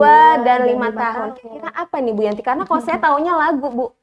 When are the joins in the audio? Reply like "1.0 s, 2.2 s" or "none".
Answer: none